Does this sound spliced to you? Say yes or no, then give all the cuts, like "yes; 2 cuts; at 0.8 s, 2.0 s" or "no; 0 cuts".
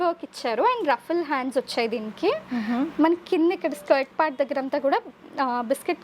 no; 0 cuts